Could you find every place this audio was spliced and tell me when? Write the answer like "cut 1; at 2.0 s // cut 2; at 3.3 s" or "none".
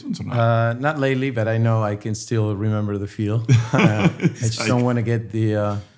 none

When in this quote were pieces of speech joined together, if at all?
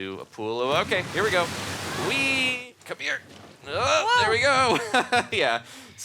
cut 1; at 2.6 s

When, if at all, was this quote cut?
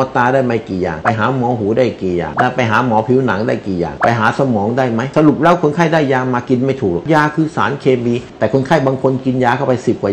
none

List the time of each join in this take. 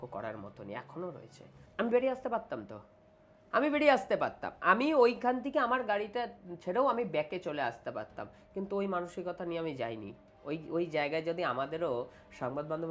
cut 1; at 1.6 s

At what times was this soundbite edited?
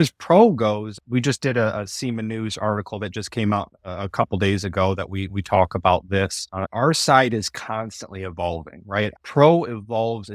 cut 1; at 0.9 s // cut 2; at 6.7 s // cut 3; at 9.1 s

